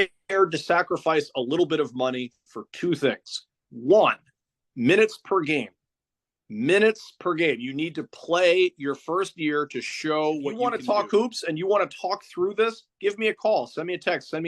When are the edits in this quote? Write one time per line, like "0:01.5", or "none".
0:10.7